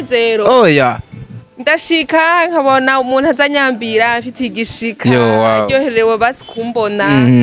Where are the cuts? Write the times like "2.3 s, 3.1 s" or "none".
none